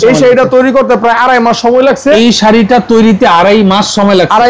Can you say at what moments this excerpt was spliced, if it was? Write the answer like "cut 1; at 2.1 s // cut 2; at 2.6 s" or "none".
cut 1; at 2.2 s